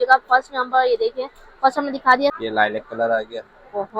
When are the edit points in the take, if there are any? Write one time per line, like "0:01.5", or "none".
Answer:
0:02.4

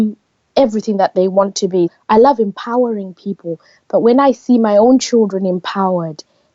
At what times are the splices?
0:01.9

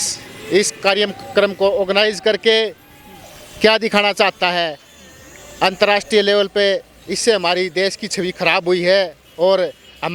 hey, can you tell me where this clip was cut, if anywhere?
none

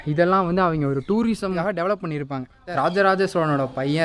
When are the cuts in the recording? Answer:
0:01.6
0:02.6

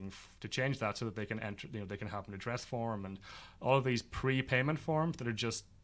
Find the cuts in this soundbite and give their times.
none

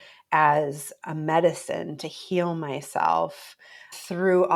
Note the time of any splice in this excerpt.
none

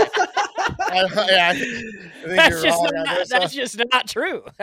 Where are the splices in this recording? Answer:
none

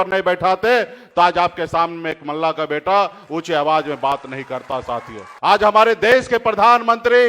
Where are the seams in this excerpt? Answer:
0:05.2

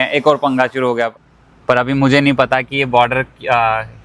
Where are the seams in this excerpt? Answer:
0:01.1

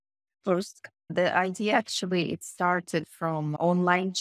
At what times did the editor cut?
0:01.1

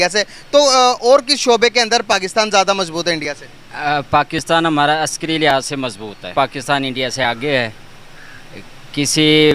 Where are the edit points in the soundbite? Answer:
0:06.3

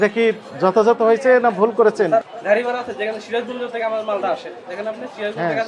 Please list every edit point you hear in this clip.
0:02.2

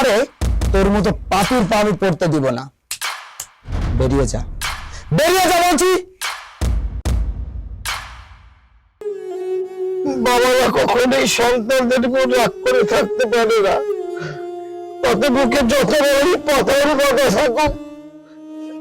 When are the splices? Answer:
0:09.0

